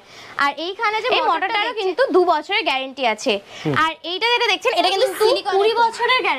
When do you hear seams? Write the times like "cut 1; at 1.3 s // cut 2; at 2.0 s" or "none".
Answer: cut 1; at 1.1 s // cut 2; at 5.1 s